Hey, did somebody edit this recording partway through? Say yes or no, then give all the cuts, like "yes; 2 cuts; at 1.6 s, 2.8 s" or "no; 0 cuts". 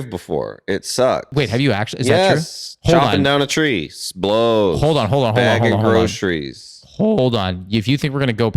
yes; 1 cut; at 1.3 s